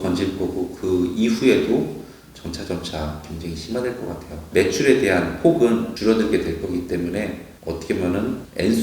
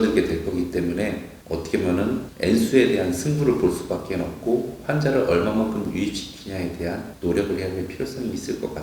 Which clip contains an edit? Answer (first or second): first